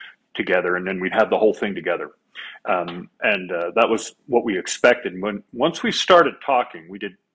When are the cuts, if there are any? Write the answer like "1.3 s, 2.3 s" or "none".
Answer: none